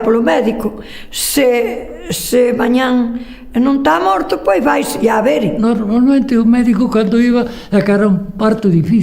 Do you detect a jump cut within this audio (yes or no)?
yes